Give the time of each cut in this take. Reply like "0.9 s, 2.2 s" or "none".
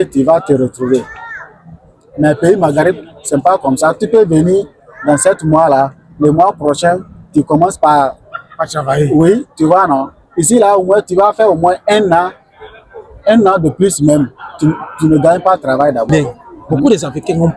16.1 s